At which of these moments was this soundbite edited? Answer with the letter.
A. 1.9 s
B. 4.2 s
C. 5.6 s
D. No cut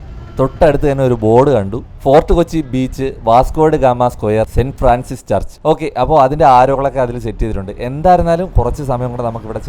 D